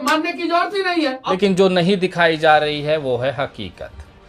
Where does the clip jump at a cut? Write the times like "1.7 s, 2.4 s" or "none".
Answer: 1.3 s